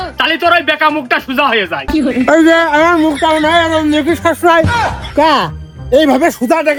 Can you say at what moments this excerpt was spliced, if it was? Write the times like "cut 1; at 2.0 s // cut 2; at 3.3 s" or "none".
none